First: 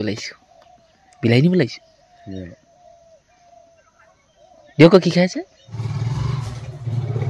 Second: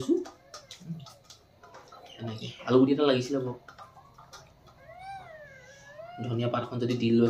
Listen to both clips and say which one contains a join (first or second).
first